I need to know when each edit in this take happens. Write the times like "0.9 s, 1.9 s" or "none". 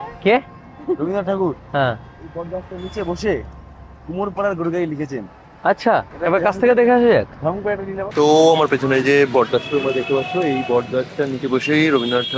none